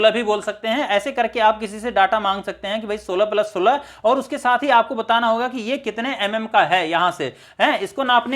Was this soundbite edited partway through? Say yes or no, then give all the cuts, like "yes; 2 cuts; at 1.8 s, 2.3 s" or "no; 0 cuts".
no; 0 cuts